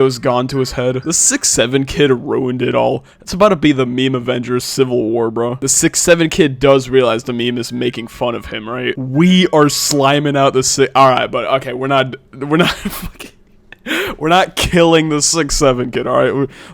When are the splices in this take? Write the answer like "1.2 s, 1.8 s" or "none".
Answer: 1.0 s, 5.6 s, 8.9 s